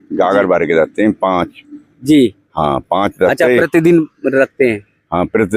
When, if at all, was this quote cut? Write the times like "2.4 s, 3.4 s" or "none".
none